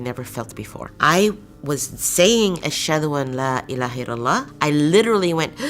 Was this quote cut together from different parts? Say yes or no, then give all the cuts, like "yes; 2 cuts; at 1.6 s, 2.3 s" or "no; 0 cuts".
yes; 1 cut; at 4.5 s